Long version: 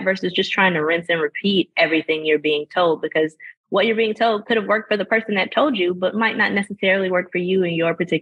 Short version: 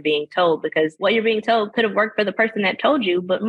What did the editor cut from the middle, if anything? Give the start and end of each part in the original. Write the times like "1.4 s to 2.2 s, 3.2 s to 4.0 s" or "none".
3.3 s to 3.7 s